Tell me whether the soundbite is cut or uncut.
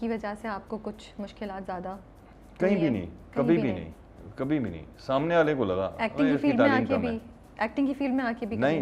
uncut